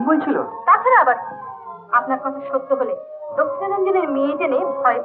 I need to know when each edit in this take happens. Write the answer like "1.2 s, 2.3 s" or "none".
none